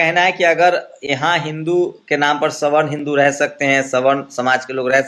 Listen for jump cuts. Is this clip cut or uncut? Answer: uncut